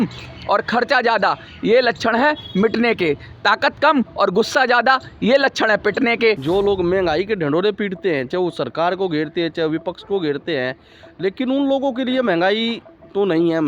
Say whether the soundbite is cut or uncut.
cut